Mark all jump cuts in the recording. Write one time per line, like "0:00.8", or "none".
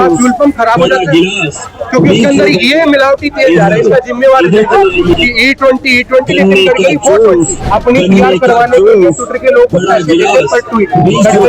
0:05.1
0:07.6